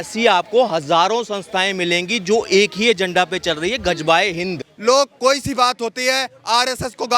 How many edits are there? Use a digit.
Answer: 1